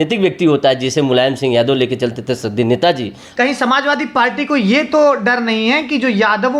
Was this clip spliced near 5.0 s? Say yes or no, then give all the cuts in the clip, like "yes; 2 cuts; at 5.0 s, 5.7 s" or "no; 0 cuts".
no; 1 cut; at 3.2 s